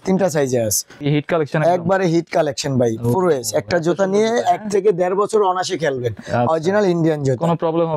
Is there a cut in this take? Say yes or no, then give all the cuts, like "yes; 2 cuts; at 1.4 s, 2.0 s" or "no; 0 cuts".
yes; 1 cut; at 1.0 s